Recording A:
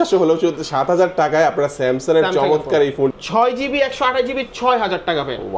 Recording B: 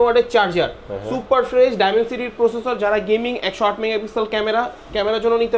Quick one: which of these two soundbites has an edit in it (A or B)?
A